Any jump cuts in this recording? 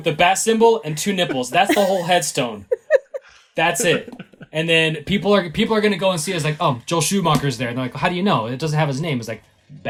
no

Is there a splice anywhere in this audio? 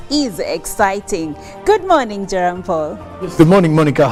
no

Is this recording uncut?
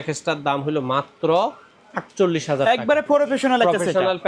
yes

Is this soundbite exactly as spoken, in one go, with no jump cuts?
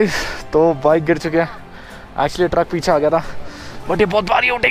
yes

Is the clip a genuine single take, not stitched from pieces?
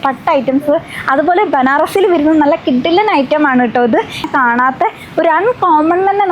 no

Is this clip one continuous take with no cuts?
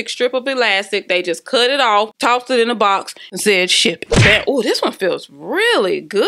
yes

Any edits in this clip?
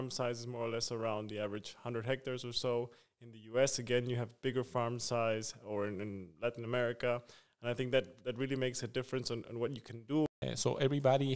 yes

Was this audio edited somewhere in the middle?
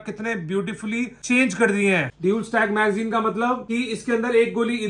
yes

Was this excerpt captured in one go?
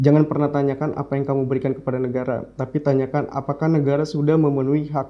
yes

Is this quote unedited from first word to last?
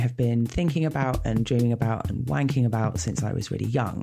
yes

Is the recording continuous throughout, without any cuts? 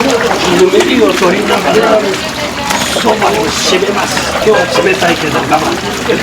no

